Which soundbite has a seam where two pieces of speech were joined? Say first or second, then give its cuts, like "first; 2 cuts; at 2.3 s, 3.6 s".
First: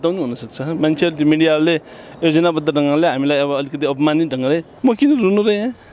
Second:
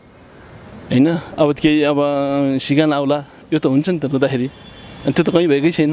first; 1 cut; at 4.7 s